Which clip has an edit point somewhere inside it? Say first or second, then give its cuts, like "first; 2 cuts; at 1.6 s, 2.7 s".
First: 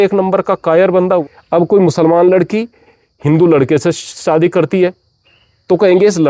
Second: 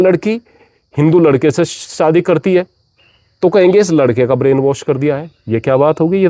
first; 1 cut; at 1.2 s